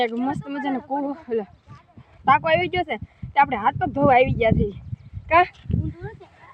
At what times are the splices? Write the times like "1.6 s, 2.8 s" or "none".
none